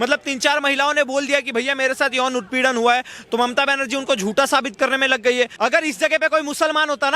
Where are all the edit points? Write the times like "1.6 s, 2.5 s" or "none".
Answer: 5.5 s